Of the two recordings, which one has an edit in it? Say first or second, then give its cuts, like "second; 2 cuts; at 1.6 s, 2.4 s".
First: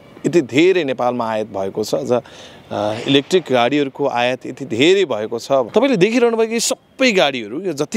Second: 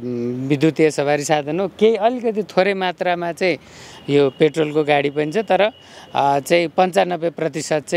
first; 1 cut; at 5.7 s